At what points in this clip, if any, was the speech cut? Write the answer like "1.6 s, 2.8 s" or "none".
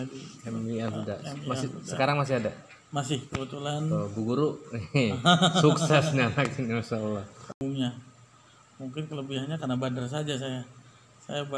7.6 s